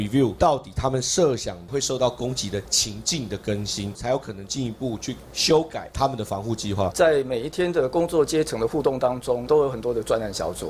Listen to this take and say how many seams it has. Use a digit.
5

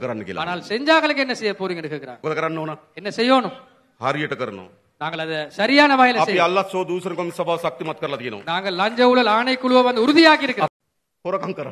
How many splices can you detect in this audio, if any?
2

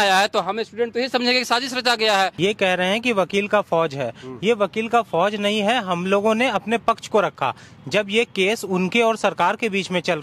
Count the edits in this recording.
1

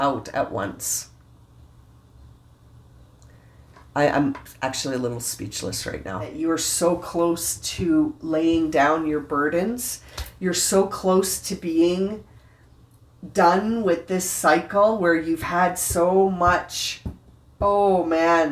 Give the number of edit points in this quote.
1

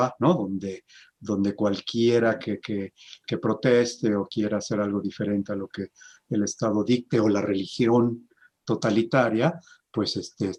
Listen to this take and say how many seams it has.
0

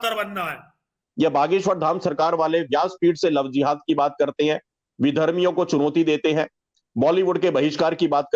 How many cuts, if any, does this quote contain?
1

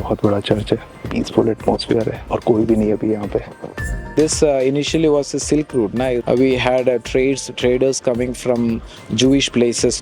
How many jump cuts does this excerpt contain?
3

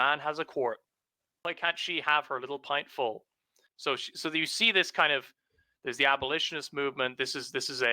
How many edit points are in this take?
2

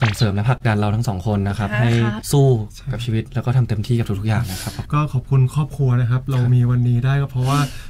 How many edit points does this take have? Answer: 1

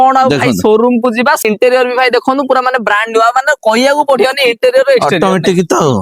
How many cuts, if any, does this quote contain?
1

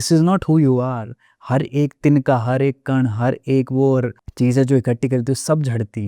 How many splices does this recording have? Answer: 1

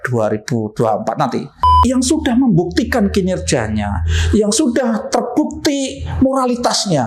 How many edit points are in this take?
1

